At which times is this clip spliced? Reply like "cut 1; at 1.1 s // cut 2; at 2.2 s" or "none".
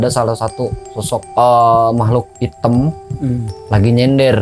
cut 1; at 1.3 s // cut 2; at 2.3 s // cut 3; at 3.5 s